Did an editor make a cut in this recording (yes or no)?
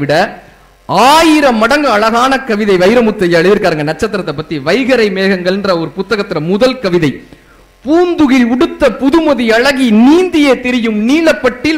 no